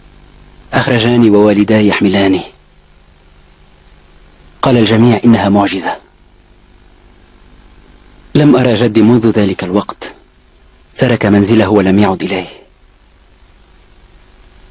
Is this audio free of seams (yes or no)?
yes